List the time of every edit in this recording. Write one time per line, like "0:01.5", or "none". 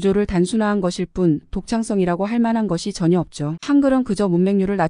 0:03.5